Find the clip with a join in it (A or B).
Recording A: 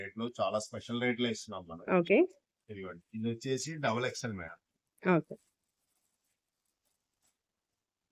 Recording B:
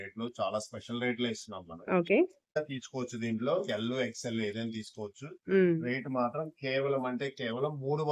B